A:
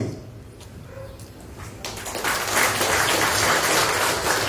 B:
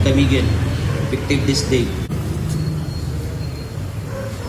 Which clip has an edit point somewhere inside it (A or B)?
B